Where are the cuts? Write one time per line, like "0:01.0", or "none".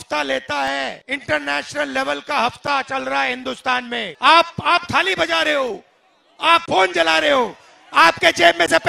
0:01.0
0:04.0